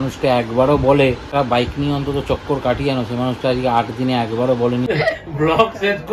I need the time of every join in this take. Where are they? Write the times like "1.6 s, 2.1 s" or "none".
1.2 s, 4.9 s